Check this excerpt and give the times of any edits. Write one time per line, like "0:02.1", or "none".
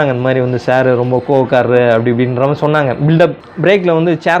0:03.4